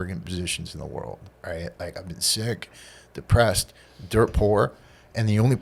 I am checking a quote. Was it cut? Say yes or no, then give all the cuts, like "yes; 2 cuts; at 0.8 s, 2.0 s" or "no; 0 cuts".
no; 0 cuts